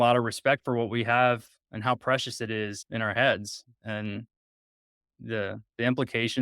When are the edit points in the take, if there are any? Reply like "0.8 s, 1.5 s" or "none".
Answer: 2.8 s, 3.7 s